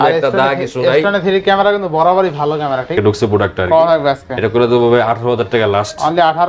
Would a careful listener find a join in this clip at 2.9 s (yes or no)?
yes